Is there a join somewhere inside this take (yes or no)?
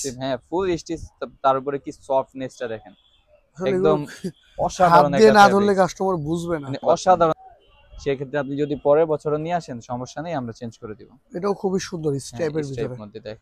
yes